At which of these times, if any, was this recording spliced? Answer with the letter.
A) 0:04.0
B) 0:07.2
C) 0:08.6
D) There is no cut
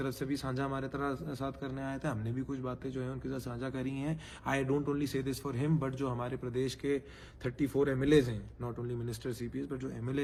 D